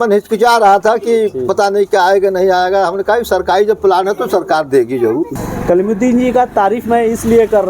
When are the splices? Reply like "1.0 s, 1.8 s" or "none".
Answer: 5.3 s